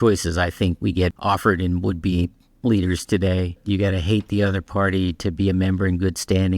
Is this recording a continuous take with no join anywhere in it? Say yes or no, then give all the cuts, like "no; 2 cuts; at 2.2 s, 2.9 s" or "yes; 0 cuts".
no; 2 cuts; at 1.2 s, 3.6 s